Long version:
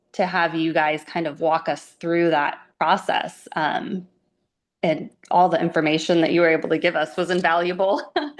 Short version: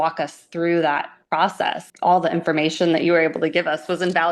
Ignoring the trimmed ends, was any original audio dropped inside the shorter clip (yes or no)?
yes